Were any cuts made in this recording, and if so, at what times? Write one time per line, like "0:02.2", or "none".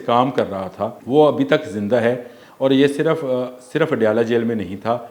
0:01.0